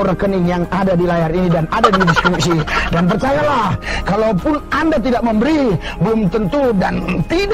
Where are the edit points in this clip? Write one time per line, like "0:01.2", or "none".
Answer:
none